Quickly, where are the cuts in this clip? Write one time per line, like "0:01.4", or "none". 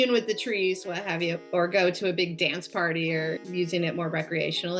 0:03.4